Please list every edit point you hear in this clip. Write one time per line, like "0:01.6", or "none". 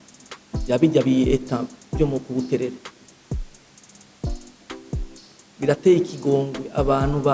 0:03.0
0:05.1